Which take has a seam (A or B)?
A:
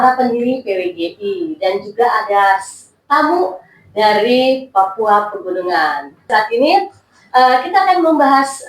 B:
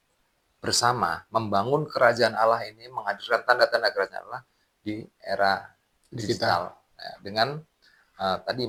A